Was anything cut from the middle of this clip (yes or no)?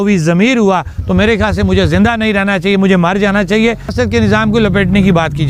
yes